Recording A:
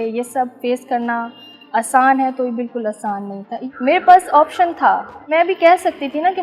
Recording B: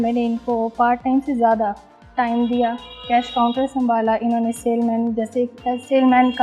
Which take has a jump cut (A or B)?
A